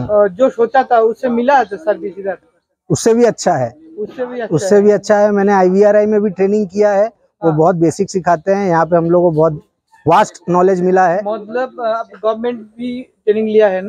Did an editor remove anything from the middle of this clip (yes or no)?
no